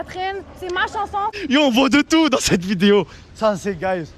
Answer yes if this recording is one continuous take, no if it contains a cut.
no